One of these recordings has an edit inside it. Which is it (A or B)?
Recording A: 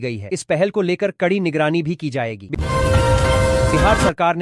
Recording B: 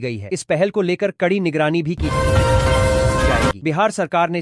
B